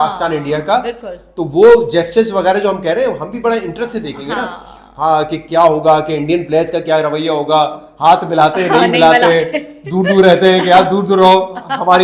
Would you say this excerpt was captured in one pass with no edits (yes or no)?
yes